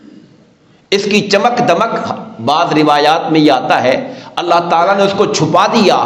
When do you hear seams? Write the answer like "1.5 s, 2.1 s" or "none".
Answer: none